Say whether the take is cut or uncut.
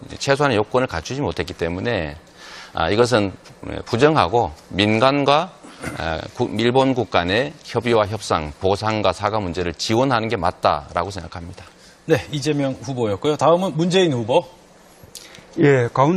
cut